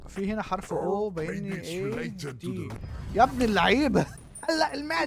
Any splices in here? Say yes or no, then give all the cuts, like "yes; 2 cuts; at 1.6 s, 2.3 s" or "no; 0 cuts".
yes; 1 cut; at 4.1 s